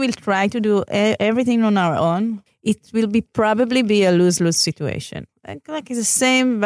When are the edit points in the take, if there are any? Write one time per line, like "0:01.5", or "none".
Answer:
0:02.5
0:05.2

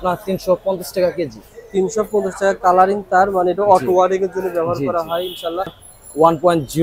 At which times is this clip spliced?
0:05.7

